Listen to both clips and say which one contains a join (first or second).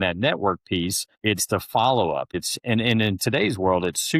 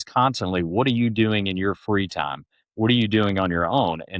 first